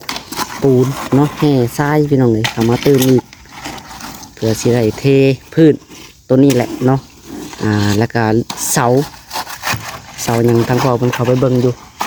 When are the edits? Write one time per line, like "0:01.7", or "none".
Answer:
none